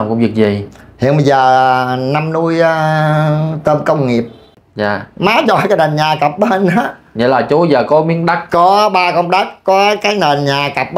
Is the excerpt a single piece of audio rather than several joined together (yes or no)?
no